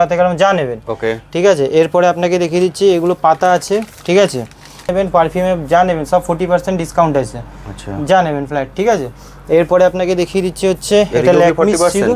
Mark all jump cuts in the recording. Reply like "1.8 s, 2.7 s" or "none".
4.9 s